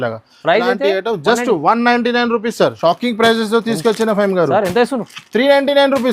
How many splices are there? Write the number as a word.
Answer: one